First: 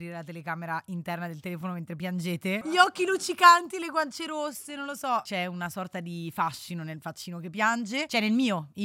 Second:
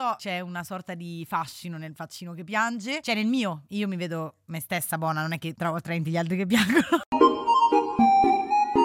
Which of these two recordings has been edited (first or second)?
second